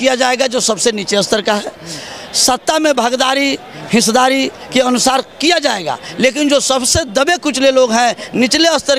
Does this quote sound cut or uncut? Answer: uncut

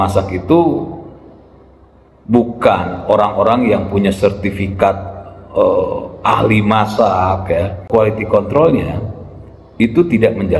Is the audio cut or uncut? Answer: cut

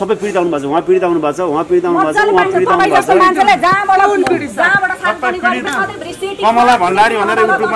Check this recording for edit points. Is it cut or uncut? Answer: cut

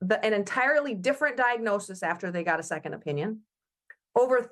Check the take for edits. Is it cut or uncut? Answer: uncut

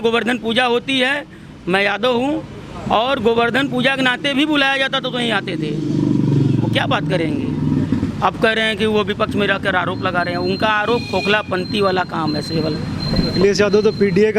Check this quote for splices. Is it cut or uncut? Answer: uncut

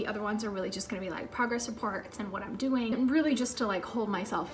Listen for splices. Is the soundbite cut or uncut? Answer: cut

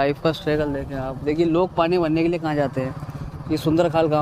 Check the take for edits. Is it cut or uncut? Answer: uncut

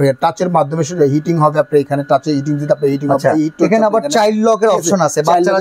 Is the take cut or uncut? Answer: uncut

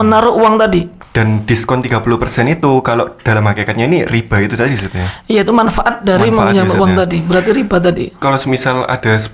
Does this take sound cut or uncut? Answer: cut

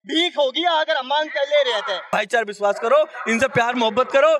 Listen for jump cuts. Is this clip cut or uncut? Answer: cut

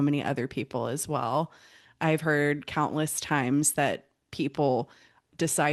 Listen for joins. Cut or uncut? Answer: uncut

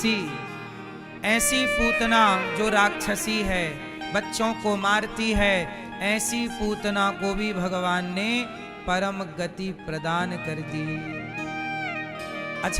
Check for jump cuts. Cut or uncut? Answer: uncut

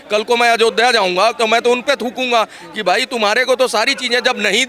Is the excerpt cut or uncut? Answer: uncut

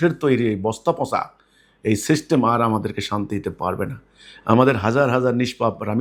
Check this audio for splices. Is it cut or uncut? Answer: uncut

